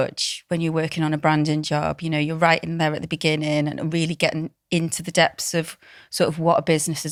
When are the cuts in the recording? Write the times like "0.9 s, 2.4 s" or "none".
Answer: none